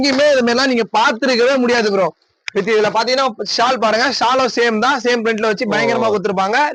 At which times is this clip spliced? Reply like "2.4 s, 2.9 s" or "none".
none